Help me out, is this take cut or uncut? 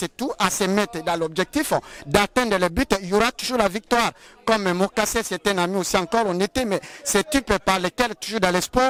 uncut